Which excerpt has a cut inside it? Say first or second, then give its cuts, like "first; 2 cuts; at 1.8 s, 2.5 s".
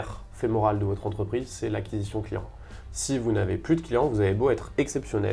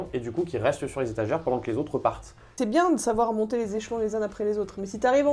second; 1 cut; at 2.5 s